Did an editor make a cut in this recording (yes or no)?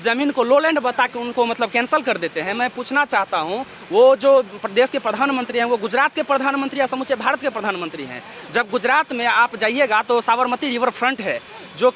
no